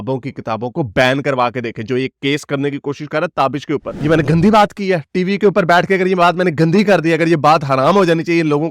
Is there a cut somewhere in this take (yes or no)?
yes